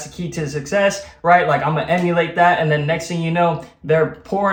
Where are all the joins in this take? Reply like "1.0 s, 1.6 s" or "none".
none